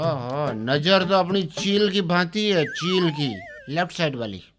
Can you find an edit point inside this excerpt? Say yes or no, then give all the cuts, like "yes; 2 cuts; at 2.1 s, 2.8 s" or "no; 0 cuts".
yes; 1 cut; at 3.5 s